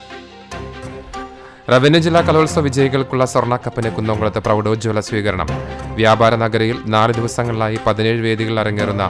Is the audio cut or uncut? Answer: cut